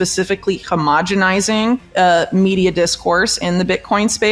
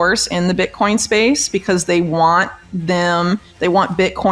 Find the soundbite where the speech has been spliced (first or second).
first